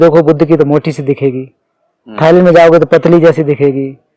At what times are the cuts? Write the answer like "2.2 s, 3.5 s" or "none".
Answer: none